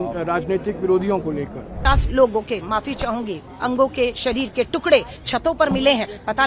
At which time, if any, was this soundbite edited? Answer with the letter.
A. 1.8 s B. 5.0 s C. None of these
A